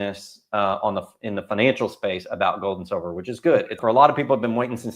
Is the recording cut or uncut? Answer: cut